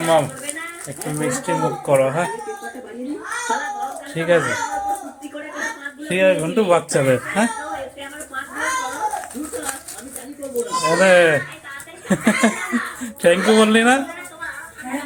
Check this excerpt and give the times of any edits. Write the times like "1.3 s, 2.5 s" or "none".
none